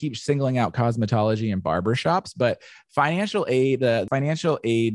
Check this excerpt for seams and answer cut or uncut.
cut